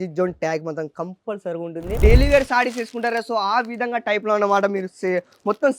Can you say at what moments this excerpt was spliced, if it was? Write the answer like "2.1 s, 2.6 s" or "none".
2.0 s